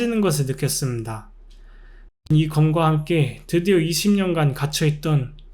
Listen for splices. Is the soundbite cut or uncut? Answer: cut